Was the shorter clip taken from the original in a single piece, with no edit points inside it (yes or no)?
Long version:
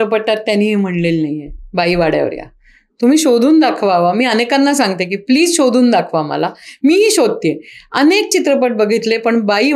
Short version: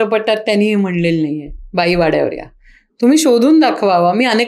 yes